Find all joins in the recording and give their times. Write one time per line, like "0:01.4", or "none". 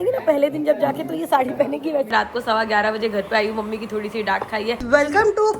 0:02.1
0:04.8